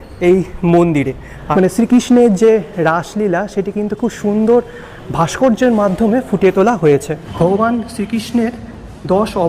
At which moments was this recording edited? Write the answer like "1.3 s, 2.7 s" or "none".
1.3 s, 7.2 s